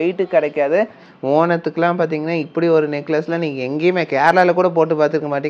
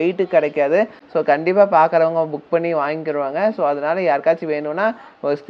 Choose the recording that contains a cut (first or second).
first